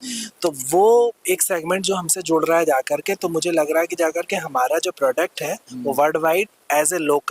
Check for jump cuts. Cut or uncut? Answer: uncut